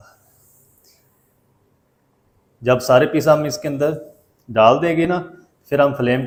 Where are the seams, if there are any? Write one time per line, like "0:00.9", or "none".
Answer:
none